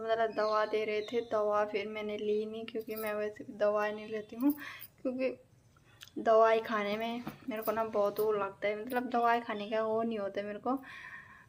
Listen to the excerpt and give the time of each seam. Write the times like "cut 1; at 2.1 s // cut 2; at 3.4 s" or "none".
none